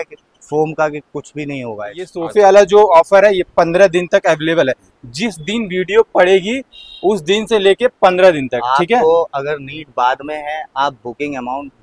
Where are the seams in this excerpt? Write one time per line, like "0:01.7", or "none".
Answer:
0:02.2